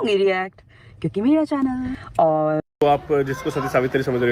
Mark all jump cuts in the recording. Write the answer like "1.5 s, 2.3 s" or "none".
2.6 s